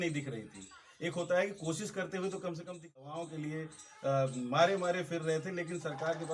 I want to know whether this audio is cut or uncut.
cut